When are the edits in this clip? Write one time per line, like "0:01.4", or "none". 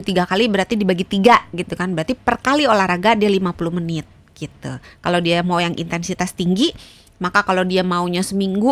none